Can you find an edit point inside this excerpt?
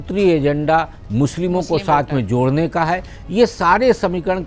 no; 0 cuts

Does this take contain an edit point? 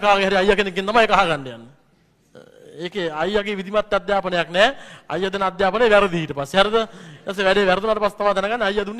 no; 0 cuts

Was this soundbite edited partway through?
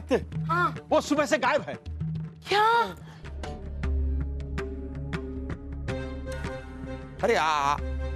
yes; 1 cut; at 3.3 s

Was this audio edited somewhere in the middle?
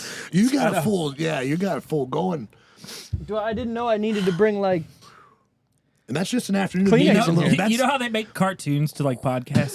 no; 0 cuts

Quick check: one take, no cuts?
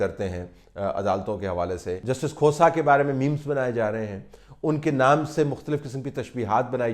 no; 1 cut; at 2.0 s

